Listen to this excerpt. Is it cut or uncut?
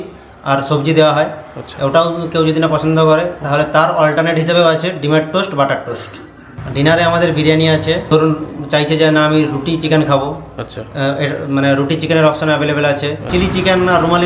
cut